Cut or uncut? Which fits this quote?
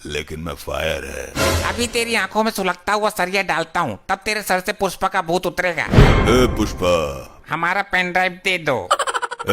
cut